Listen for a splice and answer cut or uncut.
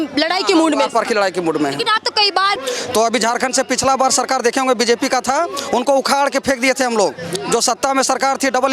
cut